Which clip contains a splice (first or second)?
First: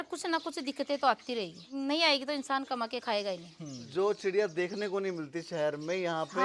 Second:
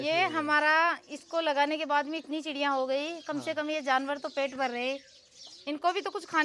first